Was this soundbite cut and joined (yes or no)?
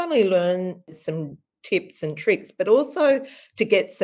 yes